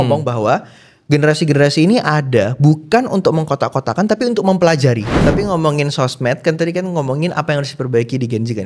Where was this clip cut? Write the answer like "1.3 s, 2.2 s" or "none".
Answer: 5.2 s